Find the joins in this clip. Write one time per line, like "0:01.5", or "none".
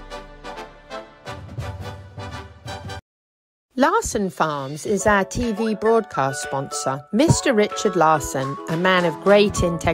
0:02.9